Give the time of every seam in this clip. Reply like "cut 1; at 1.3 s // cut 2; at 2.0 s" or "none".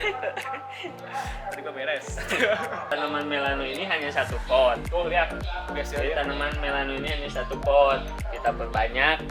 cut 1; at 2.9 s